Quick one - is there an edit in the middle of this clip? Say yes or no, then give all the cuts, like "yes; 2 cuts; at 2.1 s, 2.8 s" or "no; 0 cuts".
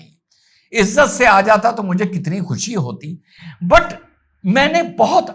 no; 0 cuts